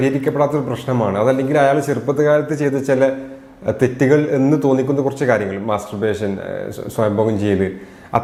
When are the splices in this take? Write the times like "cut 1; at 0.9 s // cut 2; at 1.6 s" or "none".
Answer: none